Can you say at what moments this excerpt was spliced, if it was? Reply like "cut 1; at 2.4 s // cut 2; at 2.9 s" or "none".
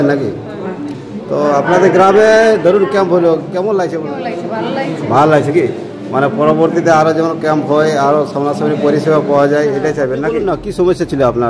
cut 1; at 4.0 s // cut 2; at 10.4 s

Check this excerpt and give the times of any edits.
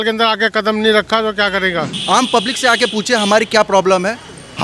cut 1; at 1.9 s

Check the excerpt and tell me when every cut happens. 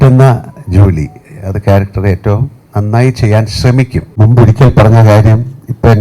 cut 1; at 4.1 s

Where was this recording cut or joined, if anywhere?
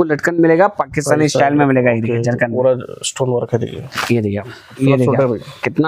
cut 1; at 4.7 s

